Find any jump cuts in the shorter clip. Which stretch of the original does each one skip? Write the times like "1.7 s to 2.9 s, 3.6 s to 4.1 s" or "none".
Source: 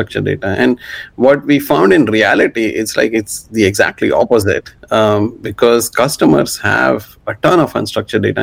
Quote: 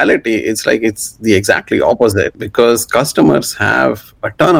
4.7 s to 5.4 s